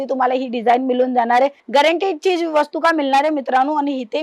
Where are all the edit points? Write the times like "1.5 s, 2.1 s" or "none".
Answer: 1.6 s